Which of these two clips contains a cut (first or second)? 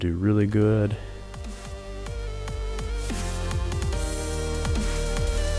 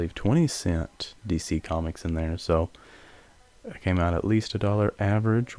first